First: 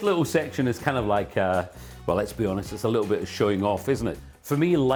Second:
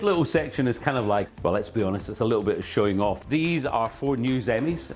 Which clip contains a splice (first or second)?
second